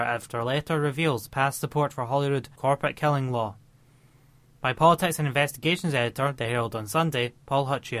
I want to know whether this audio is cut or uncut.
uncut